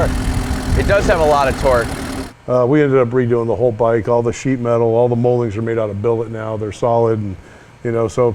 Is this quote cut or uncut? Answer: cut